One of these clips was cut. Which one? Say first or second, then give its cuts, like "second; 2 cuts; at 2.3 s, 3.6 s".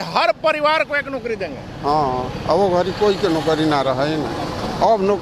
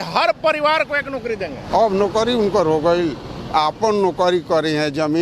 second; 1 cut; at 1.6 s